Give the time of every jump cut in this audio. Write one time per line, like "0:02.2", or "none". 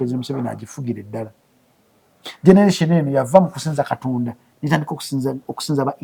none